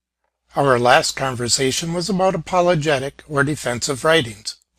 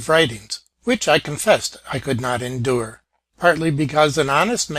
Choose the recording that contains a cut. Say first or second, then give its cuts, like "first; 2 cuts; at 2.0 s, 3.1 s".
second; 1 cut; at 2.8 s